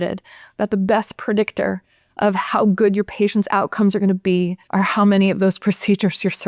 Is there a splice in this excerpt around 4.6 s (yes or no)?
yes